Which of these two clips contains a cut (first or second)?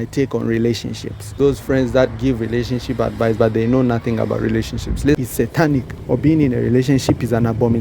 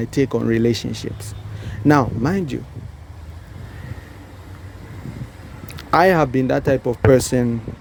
first